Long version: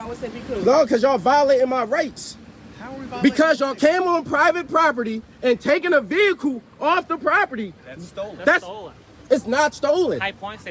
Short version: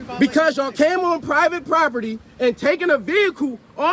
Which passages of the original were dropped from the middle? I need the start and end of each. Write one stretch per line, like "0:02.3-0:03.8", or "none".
none